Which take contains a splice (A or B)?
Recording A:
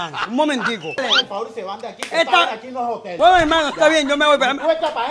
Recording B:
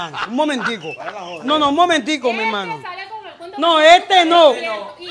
A